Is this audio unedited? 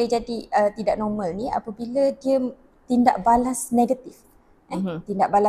yes; 0 cuts

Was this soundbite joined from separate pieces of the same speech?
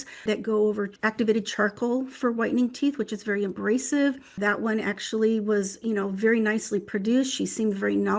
yes; 1 cut; at 1.0 s

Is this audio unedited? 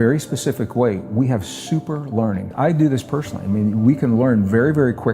no; 1 cut; at 2.5 s

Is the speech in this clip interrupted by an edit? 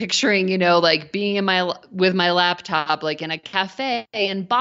no; 0 cuts

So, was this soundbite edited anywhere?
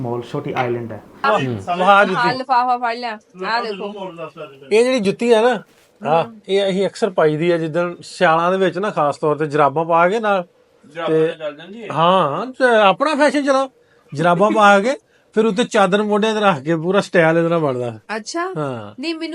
yes; 1 cut; at 1.2 s

